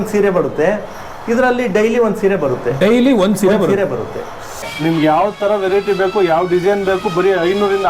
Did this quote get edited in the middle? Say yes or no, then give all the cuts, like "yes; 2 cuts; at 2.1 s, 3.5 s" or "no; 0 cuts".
yes; 1 cut; at 4.6 s